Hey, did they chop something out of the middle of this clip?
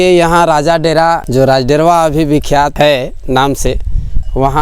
yes; 2 cuts; at 1.2 s, 2.7 s

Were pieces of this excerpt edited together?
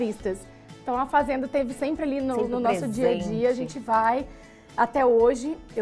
no; 0 cuts

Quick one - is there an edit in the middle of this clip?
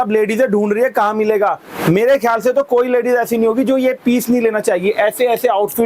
no; 0 cuts

